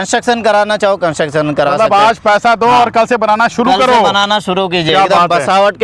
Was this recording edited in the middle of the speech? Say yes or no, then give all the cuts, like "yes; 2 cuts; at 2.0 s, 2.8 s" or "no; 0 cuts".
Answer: no; 0 cuts